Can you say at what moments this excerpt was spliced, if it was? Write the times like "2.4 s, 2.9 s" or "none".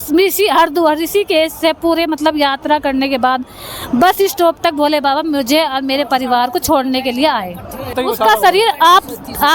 8.0 s